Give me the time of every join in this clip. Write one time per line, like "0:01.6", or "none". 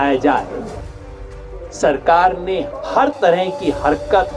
0:01.2
0:02.7